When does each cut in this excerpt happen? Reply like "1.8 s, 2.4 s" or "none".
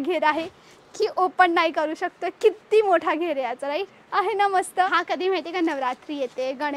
4.0 s, 4.9 s